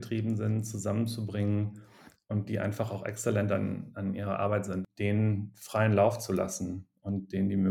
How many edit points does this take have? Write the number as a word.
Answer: one